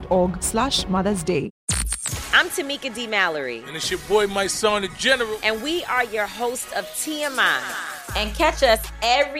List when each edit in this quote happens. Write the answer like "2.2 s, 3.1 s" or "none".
1.6 s